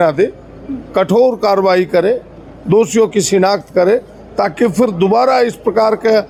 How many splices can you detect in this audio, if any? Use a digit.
0